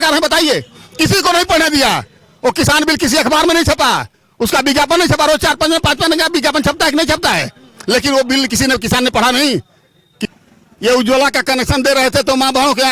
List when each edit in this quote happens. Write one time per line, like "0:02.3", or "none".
0:10.2